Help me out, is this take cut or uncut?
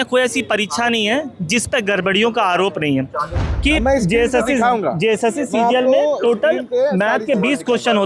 cut